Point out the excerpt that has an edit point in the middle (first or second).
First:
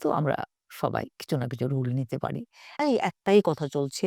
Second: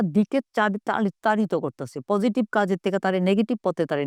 first